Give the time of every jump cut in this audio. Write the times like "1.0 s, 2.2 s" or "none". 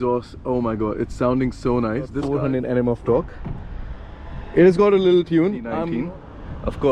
2.2 s, 5.8 s